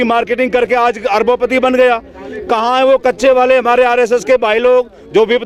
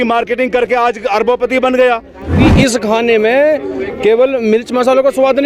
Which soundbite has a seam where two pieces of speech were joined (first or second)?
second